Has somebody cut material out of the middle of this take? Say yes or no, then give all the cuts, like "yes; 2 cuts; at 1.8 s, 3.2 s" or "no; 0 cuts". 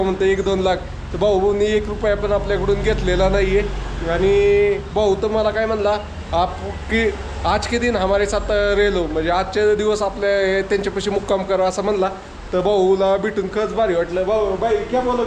no; 0 cuts